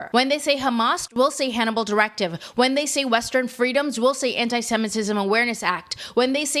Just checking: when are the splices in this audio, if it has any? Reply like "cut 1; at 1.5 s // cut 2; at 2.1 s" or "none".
none